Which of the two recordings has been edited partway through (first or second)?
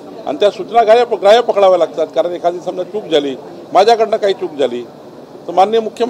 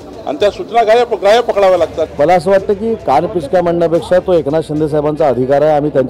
second